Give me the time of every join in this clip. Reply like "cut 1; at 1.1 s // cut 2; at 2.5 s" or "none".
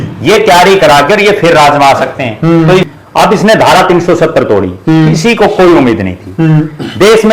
cut 1; at 2.8 s

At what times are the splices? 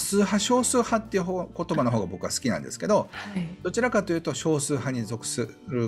none

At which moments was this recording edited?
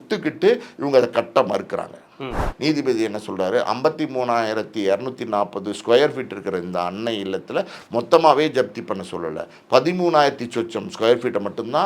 cut 1; at 2.4 s

